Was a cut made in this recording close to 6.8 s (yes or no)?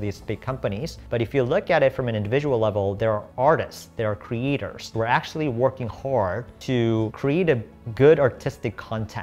yes